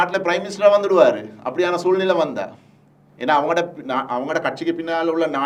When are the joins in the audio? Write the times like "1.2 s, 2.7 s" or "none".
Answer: none